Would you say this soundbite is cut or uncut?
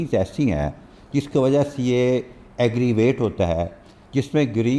uncut